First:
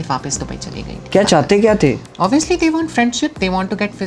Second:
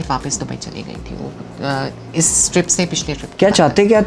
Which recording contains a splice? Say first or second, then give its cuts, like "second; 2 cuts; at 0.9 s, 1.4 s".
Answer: first; 1 cut; at 1.0 s